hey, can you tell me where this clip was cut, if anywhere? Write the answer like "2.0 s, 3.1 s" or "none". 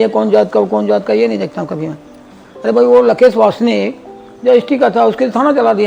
none